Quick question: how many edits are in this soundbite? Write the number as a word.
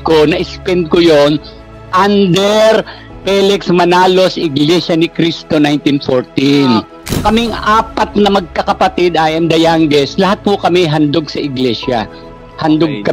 one